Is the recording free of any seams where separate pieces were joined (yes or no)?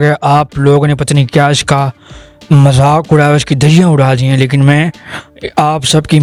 yes